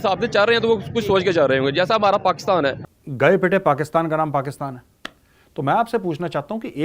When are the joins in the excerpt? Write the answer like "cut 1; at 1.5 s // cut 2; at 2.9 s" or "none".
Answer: cut 1; at 2.8 s